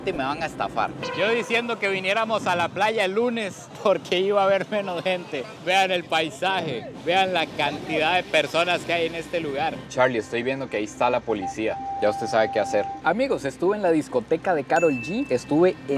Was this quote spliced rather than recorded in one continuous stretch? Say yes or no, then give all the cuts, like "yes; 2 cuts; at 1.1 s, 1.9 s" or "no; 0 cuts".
yes; 4 cuts; at 1.1 s, 9.8 s, 11.9 s, 12.9 s